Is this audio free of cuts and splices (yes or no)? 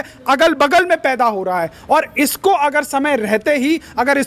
yes